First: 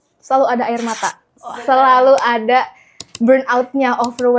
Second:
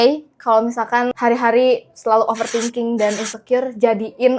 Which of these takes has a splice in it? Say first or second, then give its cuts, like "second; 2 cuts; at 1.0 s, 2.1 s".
second; 1 cut; at 1.1 s